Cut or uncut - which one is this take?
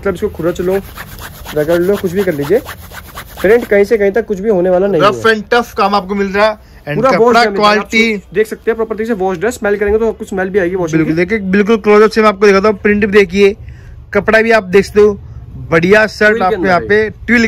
uncut